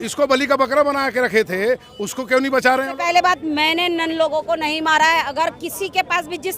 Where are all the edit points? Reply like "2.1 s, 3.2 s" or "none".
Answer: 2.9 s